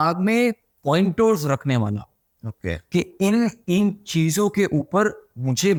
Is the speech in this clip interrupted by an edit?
no; 0 cuts

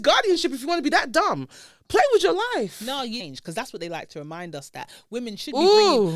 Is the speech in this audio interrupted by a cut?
yes; 1 cut; at 3.2 s

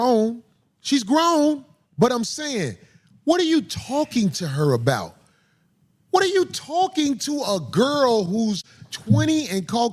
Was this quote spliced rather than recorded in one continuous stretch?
no; 0 cuts

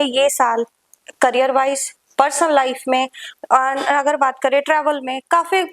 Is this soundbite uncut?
yes; 0 cuts

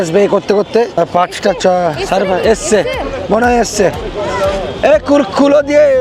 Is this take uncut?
yes; 0 cuts

